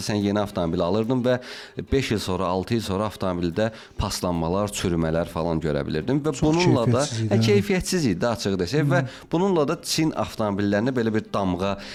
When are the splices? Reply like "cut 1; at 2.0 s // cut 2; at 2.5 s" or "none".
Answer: none